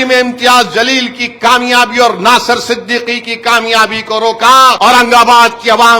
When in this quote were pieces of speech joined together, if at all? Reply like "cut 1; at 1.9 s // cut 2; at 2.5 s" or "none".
cut 1; at 4.8 s